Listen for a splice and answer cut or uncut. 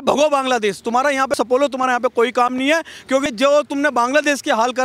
cut